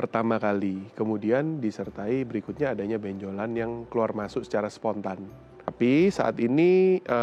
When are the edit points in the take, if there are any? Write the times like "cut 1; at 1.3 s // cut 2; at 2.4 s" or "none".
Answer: cut 1; at 5.7 s